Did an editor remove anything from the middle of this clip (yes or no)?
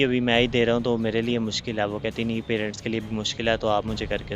no